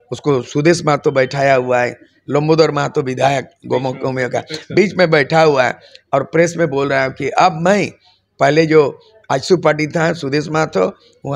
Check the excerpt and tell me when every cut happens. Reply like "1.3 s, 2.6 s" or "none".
none